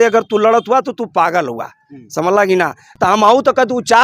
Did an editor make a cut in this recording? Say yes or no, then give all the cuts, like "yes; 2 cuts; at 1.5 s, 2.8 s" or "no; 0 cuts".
yes; 1 cut; at 2.9 s